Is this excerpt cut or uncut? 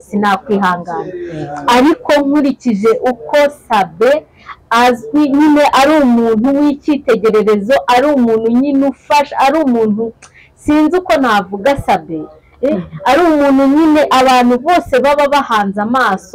uncut